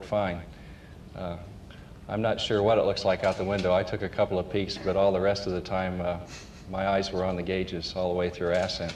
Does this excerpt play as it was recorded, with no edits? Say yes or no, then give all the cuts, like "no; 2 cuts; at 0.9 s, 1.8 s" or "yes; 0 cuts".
yes; 0 cuts